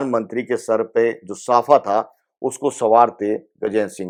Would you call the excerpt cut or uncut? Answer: uncut